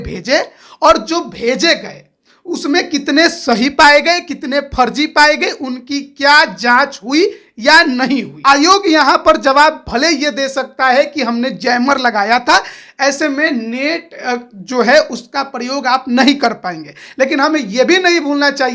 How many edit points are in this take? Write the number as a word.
one